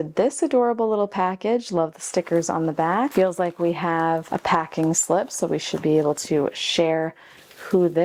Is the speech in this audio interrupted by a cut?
no; 0 cuts

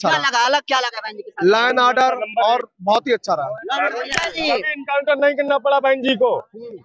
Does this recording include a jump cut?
yes; 1 cut; at 4.2 s

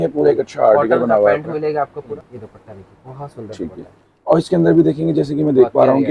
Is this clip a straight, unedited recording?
no; 1 cut; at 2.2 s

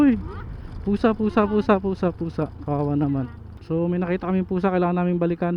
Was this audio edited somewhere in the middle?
yes; 1 cut; at 3.5 s

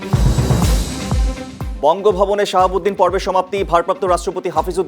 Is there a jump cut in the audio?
yes; 1 cut; at 1.6 s

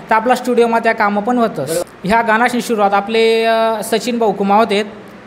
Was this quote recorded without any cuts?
no; 1 cut; at 1.9 s

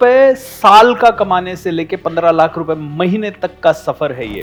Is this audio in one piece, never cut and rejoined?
yes; 0 cuts

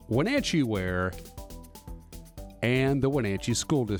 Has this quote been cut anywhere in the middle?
no; 0 cuts

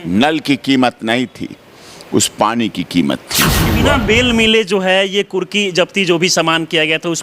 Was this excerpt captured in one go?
no; 1 cut; at 3.7 s

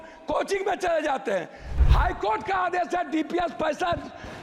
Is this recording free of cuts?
no; 1 cut; at 1.7 s

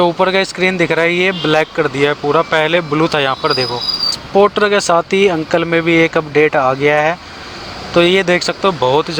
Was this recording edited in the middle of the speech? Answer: yes; 1 cut; at 4.1 s

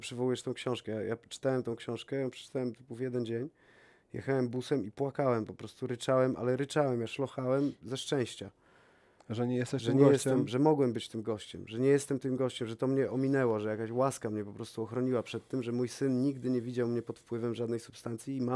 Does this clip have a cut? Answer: no; 0 cuts

